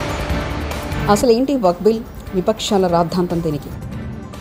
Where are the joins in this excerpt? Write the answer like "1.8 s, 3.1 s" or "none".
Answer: 1.0 s